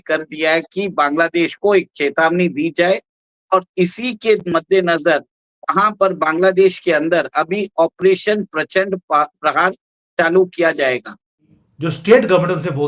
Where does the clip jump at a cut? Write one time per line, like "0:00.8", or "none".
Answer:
0:11.5